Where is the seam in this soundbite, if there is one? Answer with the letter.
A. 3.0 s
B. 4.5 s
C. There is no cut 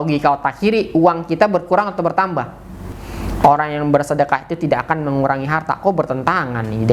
A